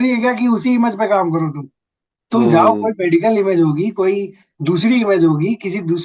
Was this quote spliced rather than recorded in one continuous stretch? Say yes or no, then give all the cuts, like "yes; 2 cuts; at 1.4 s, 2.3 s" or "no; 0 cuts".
no; 0 cuts